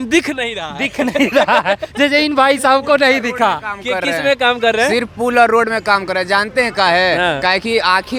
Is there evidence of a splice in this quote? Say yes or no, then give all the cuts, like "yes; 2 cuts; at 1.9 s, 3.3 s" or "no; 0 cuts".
no; 0 cuts